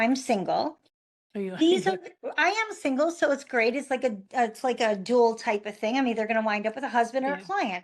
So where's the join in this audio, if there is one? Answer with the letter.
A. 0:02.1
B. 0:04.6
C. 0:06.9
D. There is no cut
D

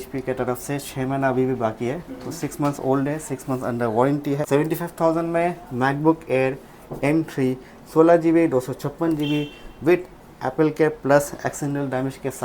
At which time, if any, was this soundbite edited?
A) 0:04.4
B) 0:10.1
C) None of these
A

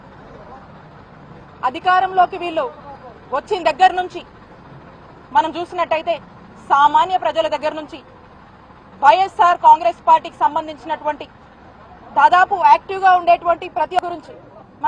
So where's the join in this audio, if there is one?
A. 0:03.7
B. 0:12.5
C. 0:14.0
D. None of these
C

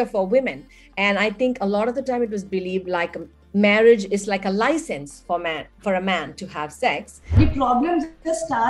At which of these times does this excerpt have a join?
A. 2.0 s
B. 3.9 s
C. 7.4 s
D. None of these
C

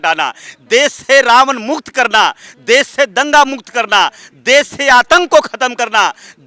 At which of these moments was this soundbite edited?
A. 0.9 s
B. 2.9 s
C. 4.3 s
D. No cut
D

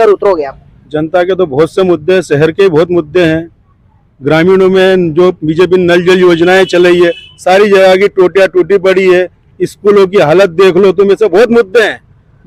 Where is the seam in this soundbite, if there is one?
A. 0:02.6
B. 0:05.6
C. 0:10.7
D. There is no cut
D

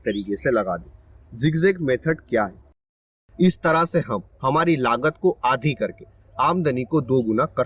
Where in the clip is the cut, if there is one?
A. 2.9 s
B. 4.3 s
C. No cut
A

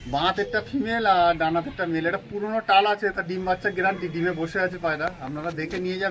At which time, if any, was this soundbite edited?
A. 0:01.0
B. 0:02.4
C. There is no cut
C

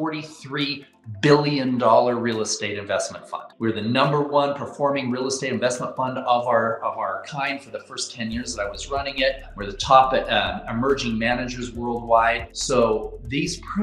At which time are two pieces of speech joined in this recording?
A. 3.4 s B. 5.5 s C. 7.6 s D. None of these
A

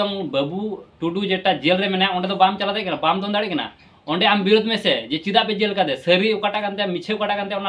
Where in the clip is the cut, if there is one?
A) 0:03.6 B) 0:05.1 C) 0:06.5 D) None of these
D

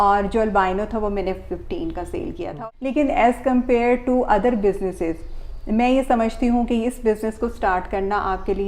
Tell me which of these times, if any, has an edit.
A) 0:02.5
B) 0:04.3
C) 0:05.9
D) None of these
A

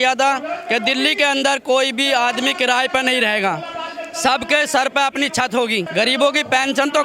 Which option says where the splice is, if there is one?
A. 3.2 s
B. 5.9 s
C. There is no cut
B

